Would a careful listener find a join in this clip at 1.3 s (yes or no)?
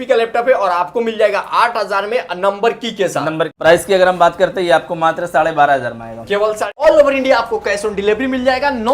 no